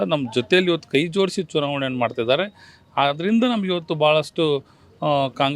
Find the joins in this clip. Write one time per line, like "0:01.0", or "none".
none

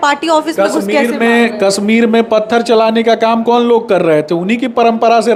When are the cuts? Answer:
none

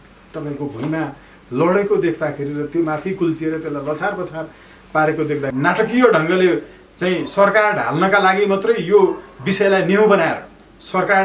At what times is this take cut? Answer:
0:05.5

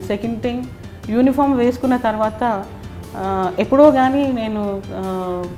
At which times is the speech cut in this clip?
none

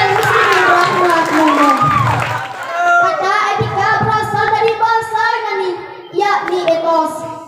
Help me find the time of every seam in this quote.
0:02.5

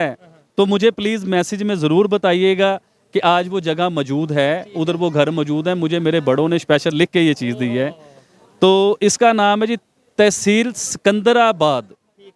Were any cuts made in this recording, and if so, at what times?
none

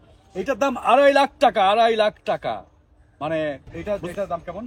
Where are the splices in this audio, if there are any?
0:03.7

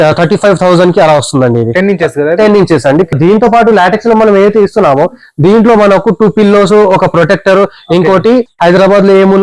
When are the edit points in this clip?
0:03.1

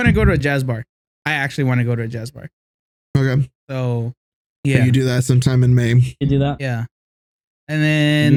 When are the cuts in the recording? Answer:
none

